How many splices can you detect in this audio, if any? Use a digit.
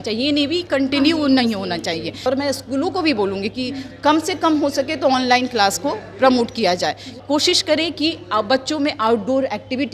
2